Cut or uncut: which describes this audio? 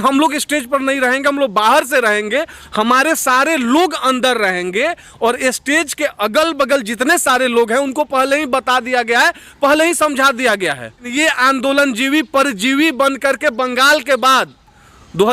cut